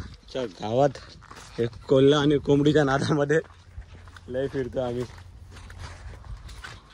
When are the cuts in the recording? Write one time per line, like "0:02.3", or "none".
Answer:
none

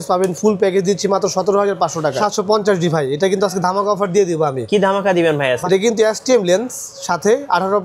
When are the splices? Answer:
0:02.2
0:05.6

